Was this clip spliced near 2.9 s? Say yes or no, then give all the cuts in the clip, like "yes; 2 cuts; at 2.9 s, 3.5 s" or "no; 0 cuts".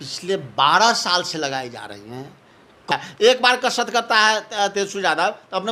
yes; 1 cut; at 2.9 s